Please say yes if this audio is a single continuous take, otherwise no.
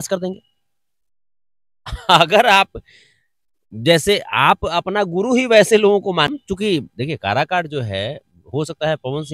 no